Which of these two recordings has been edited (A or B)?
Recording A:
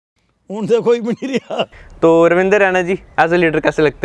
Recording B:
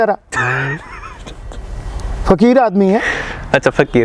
A